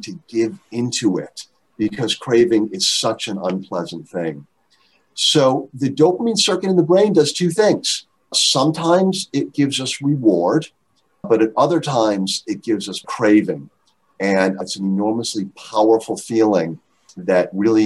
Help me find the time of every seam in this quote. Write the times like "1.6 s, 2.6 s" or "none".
none